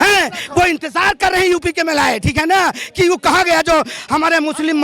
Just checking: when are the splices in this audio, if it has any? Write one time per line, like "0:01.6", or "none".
none